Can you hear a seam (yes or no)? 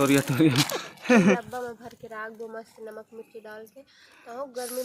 yes